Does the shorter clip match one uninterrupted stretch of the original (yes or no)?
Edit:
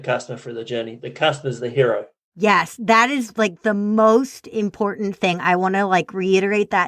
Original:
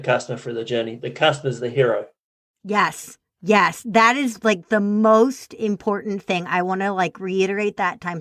no